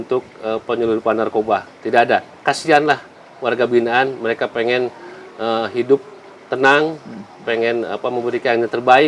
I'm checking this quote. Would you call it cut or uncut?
uncut